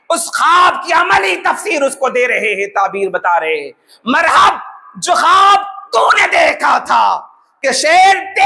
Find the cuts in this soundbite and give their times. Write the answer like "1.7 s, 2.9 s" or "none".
none